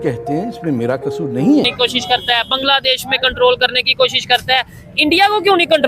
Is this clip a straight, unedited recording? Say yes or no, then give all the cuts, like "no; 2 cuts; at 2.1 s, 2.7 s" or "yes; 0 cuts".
no; 1 cut; at 1.7 s